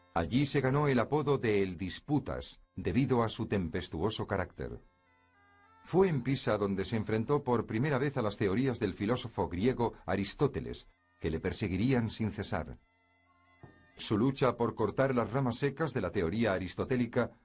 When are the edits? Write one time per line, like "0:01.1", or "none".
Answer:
0:05.3